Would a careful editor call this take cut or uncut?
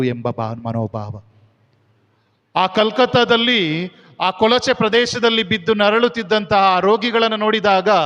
uncut